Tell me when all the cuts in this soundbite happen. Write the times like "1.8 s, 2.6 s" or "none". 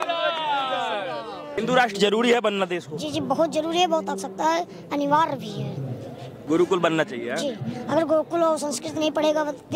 1.6 s, 6.3 s

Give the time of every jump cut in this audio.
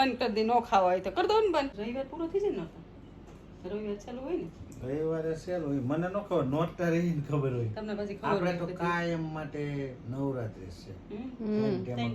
1.8 s

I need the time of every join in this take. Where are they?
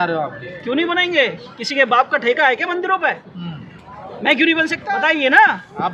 4.8 s

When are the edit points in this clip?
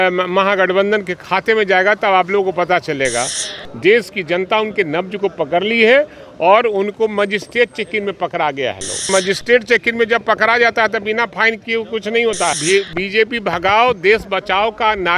3.4 s, 9.1 s, 12.6 s

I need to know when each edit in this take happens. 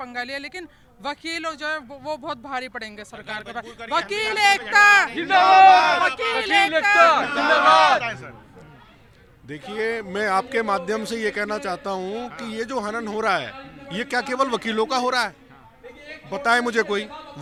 none

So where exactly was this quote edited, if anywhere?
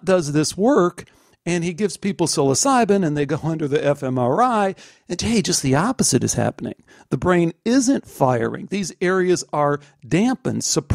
none

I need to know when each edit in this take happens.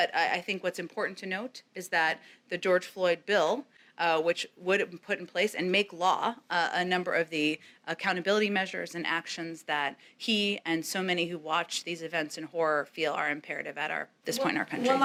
none

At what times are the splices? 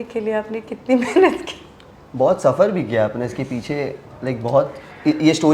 none

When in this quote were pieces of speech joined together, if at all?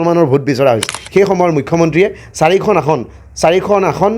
0.9 s

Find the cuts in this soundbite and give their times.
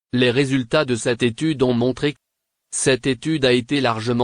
2.1 s

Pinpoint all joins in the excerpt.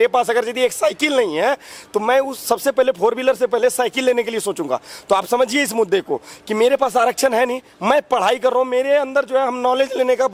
none

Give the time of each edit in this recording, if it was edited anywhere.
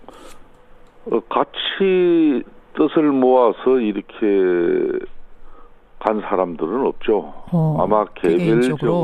5.0 s

